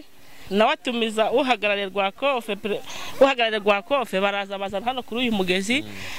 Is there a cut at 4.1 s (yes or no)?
no